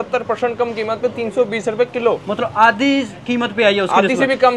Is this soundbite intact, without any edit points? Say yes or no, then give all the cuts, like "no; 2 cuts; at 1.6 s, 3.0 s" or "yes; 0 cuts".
yes; 0 cuts